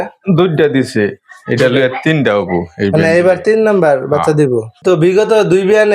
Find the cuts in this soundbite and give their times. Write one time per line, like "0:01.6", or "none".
0:04.7